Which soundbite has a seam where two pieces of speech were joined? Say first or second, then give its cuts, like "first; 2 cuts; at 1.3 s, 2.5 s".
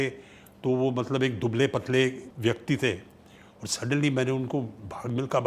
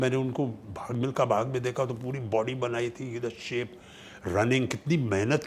first; 1 cut; at 2.3 s